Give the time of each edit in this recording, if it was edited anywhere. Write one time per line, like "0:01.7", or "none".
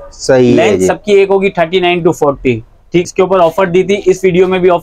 0:03.0